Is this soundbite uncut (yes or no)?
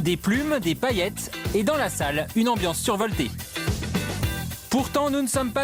yes